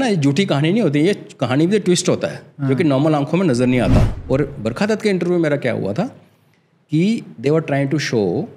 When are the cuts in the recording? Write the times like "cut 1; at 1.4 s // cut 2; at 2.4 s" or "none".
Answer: cut 1; at 4.1 s